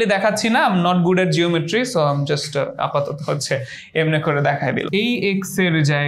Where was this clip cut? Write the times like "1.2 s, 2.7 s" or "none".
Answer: 4.9 s